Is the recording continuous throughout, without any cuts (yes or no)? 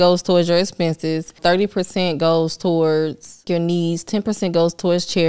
no